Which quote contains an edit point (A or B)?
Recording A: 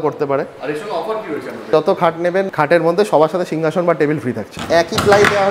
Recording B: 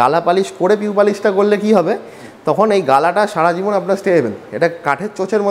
A